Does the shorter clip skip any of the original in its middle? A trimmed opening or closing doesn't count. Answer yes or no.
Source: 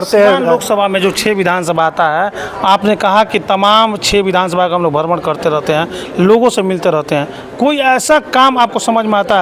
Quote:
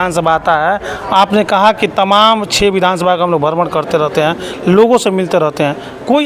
no